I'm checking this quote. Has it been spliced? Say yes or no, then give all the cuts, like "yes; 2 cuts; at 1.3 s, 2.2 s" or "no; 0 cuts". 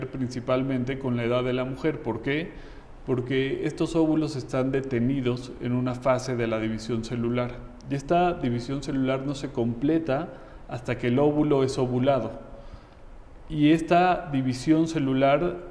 no; 0 cuts